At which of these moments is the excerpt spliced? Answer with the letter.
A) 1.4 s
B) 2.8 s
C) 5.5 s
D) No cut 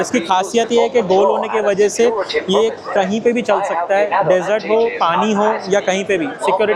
D